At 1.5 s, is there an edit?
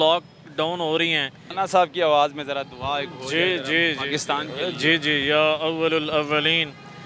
yes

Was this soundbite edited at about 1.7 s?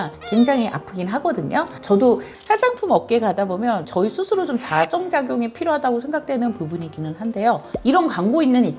yes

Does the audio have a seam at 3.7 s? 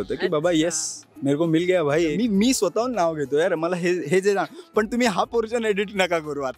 no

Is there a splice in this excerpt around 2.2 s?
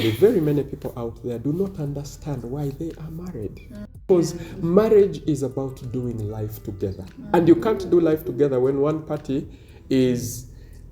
no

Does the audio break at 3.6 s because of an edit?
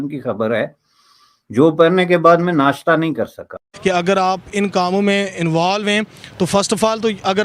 yes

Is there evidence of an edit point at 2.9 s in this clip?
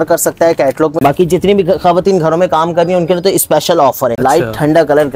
no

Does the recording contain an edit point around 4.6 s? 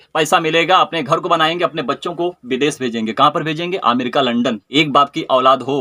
yes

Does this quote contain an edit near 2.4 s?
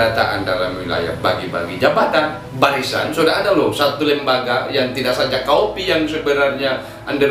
yes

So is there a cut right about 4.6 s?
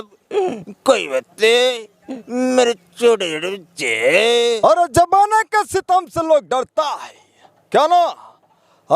yes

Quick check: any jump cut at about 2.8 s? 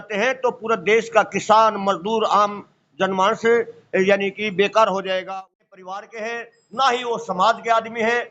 no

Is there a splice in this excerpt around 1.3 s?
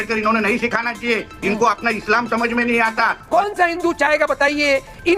no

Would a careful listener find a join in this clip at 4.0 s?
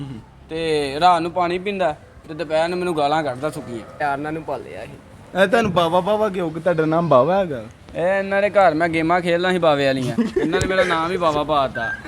yes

